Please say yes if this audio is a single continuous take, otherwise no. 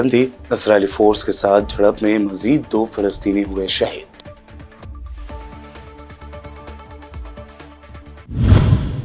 yes